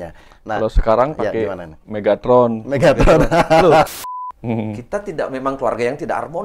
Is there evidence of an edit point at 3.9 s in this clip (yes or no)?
yes